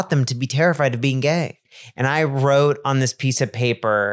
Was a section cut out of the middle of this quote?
yes; 1 cut; at 1.5 s

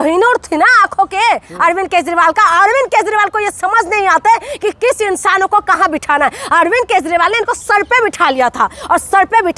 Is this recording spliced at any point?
no; 0 cuts

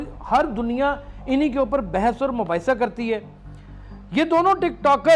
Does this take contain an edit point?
no; 0 cuts

